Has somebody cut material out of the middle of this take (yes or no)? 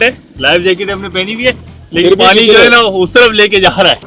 no